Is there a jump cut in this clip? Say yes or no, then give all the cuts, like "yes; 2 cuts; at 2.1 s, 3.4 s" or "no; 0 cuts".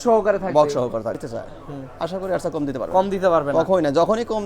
yes; 1 cut; at 1.2 s